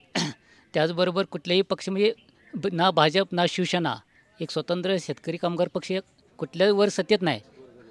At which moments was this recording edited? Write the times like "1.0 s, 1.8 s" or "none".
none